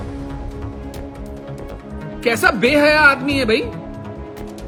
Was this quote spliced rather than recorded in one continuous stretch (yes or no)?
no